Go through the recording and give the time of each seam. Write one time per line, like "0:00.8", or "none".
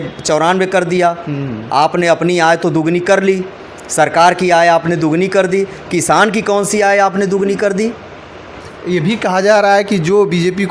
0:08.5